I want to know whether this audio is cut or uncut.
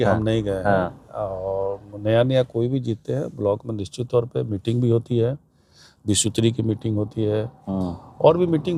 uncut